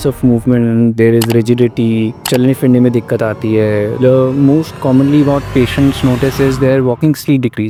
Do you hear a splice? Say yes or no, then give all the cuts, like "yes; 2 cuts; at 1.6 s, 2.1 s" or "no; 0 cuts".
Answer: no; 0 cuts